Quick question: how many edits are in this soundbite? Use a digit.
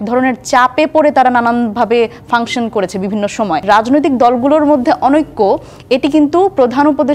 1